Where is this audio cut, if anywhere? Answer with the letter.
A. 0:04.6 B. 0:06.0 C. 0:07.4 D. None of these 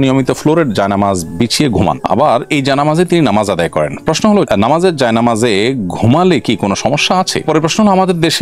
C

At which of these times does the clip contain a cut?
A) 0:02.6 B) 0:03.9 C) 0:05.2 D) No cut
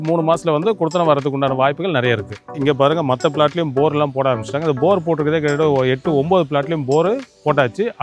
A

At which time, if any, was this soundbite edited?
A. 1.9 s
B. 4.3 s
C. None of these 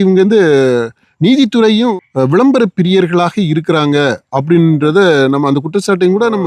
A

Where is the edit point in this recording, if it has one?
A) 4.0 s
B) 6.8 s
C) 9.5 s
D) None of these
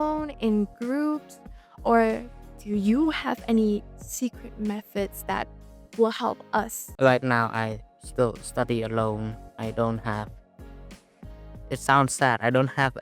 B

